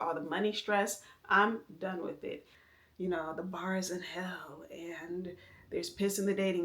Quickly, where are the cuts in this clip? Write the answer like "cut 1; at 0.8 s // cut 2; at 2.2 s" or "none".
cut 1; at 2.5 s